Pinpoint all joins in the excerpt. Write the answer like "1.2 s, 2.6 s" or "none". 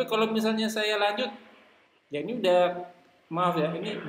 none